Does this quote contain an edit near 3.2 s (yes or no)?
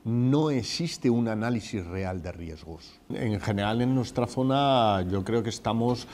yes